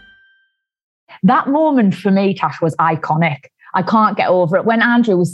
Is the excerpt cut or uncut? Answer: cut